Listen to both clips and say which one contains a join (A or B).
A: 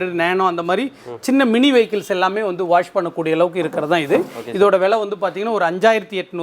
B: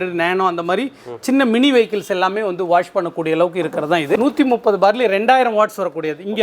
B